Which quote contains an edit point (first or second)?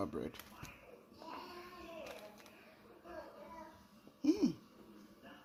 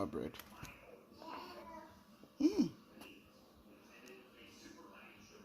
second